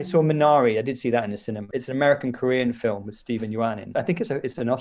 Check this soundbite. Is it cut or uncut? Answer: cut